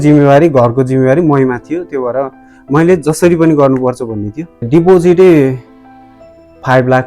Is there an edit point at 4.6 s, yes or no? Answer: yes